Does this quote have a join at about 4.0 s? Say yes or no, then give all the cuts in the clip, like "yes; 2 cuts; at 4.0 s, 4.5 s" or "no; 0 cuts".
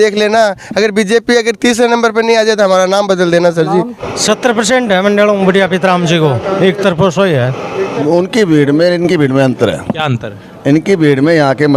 yes; 2 cuts; at 4.0 s, 7.9 s